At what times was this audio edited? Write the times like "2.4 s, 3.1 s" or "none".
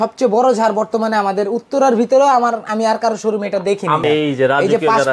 4.0 s